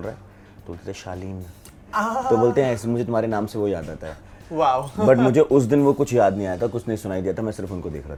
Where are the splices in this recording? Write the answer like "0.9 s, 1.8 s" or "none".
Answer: none